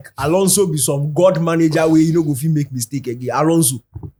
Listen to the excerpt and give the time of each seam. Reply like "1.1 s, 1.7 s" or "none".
none